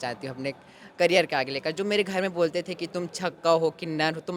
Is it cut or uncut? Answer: uncut